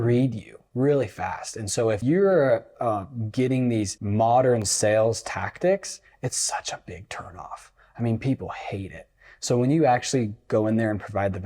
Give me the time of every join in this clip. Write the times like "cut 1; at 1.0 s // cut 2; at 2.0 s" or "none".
cut 1; at 2.0 s // cut 2; at 4.0 s